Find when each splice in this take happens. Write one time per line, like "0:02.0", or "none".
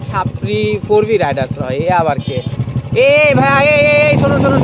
0:02.5